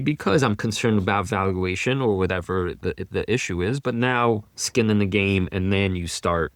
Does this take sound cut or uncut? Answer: uncut